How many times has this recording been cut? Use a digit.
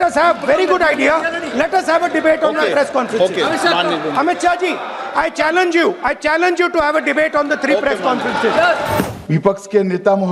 1